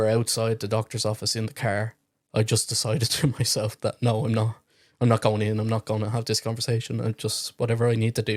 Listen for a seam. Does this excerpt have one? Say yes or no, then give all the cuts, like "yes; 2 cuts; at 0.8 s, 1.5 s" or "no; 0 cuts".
no; 0 cuts